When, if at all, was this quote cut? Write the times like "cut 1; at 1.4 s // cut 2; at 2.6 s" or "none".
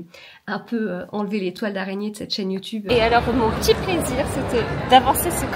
cut 1; at 2.9 s

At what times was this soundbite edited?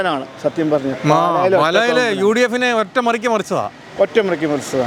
none

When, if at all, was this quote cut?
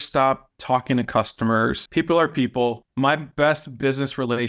cut 1; at 1.8 s // cut 2; at 2.8 s

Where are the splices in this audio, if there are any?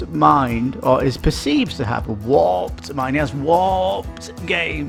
none

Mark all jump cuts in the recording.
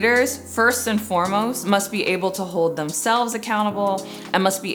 none

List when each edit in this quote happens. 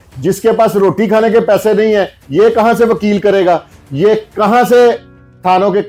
none

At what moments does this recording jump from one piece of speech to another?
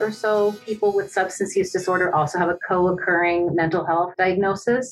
cut 1; at 2.6 s // cut 2; at 4.1 s

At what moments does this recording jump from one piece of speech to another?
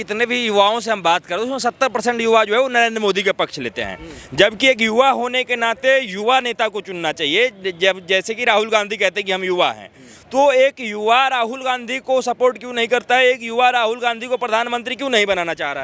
none

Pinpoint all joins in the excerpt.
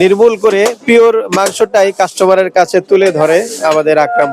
none

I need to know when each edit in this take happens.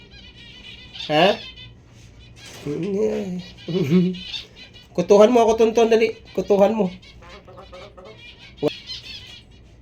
cut 1; at 8.7 s

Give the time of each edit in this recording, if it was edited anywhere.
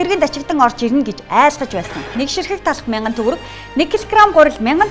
cut 1; at 2.1 s

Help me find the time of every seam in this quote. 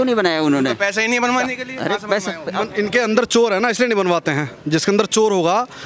cut 1; at 2.4 s

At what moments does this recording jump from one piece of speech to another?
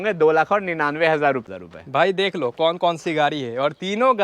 cut 1; at 1.5 s

